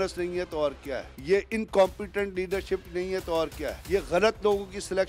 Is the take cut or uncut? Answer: cut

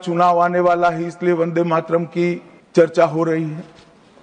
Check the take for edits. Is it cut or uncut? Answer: cut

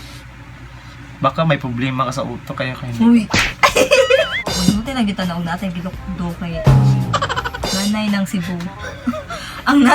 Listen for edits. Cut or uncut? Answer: cut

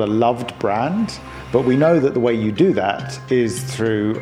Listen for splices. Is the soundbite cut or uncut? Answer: uncut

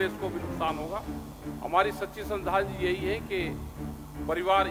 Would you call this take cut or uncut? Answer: uncut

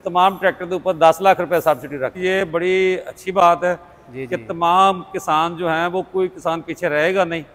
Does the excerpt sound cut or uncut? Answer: cut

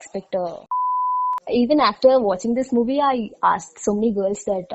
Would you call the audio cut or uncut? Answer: cut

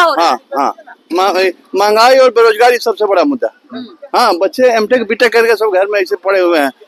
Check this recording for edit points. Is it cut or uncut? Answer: uncut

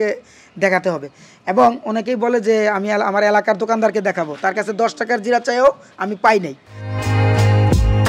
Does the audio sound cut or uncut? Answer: uncut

